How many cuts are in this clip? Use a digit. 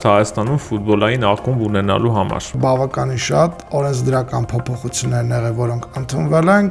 1